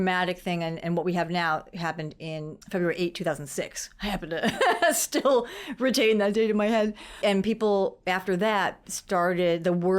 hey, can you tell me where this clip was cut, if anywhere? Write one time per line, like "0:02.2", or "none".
0:02.5
0:07.2